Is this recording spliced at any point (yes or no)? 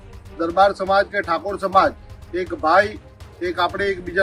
no